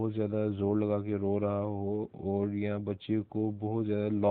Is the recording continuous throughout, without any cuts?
yes; 0 cuts

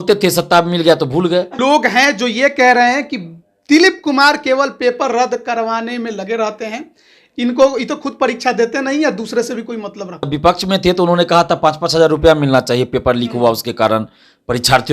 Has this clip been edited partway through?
yes; 2 cuts; at 1.5 s, 10.3 s

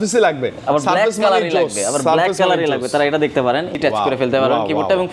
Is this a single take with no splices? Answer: no; 1 cut; at 3.8 s

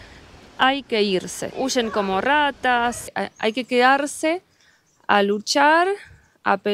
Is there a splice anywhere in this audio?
yes; 2 cuts; at 1.5 s, 3.1 s

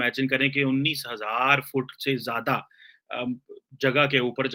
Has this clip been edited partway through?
no; 0 cuts

